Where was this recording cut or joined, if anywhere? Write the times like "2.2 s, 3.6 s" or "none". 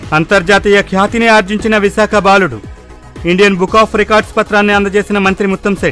none